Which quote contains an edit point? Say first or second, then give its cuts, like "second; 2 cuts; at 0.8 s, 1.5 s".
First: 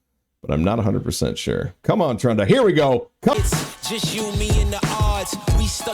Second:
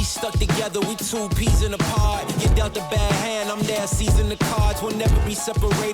first; 1 cut; at 3.3 s